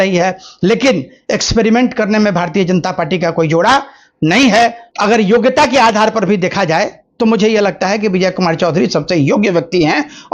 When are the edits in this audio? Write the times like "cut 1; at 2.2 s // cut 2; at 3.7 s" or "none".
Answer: cut 1; at 4.9 s